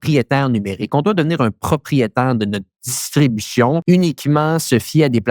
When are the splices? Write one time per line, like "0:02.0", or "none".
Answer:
0:03.8